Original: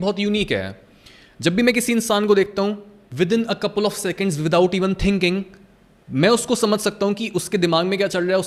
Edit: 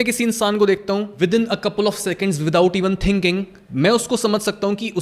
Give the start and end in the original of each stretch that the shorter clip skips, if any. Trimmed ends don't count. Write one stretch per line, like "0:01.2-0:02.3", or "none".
0:02.8-0:03.1
0:05.6-0:06.0